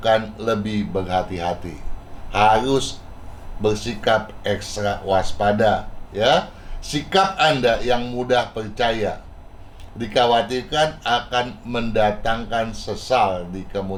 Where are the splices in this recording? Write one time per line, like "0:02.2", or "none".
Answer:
none